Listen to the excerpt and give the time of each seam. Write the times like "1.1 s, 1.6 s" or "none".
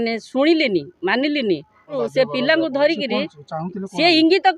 1.9 s